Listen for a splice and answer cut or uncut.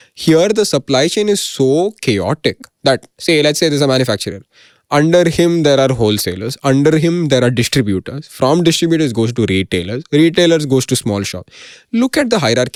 uncut